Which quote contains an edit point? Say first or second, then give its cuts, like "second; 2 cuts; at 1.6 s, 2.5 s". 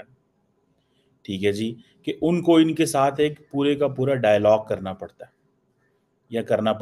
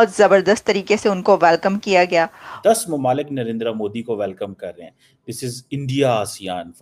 second; 1 cut; at 2.4 s